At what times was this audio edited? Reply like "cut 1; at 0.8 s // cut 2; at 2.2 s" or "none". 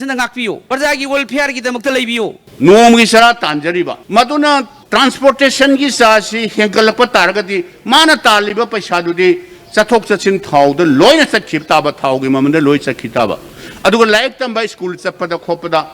cut 1; at 2.4 s